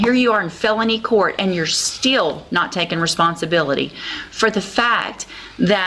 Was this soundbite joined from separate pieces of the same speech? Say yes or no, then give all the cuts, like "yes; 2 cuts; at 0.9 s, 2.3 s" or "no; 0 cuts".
no; 0 cuts